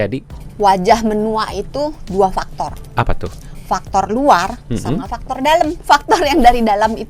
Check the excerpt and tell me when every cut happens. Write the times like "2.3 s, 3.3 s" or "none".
5.8 s

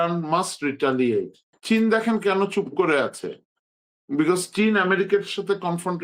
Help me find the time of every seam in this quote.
1.5 s

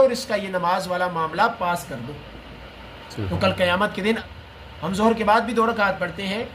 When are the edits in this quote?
4.2 s

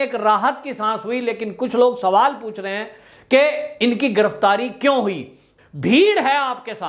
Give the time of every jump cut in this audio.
5.4 s

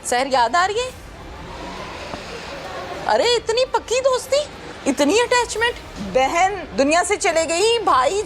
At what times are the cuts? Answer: 3.0 s, 4.6 s, 5.9 s, 6.6 s

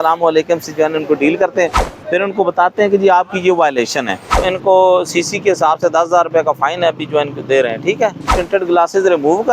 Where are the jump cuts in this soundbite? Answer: 4.4 s, 8.4 s

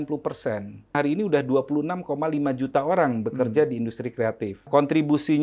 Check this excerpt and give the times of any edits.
0.9 s, 4.7 s

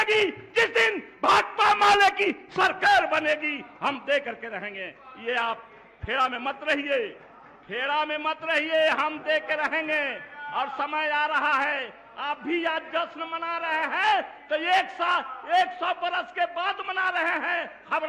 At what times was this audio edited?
none

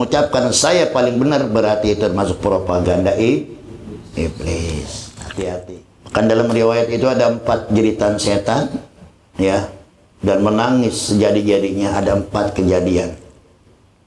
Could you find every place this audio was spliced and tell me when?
5.6 s

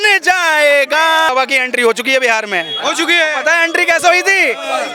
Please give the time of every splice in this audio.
1.3 s

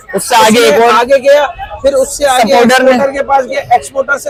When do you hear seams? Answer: none

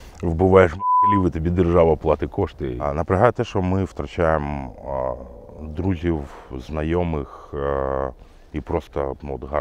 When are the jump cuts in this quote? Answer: 2.9 s

